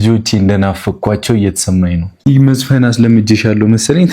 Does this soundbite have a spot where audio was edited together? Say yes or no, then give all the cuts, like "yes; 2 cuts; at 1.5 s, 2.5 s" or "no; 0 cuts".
yes; 1 cut; at 2.1 s